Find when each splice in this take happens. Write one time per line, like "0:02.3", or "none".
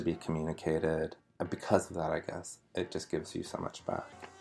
0:01.3